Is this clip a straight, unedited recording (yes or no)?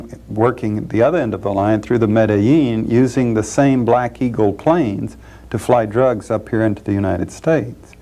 no